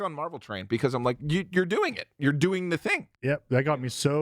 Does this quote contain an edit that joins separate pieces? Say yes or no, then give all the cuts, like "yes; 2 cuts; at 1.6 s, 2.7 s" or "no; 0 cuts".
yes; 1 cut; at 3.1 s